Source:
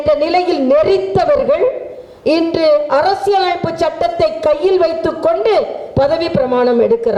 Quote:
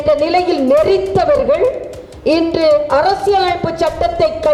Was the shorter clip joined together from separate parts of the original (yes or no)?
no